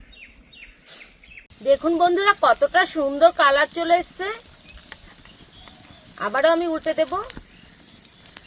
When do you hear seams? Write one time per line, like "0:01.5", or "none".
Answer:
0:01.5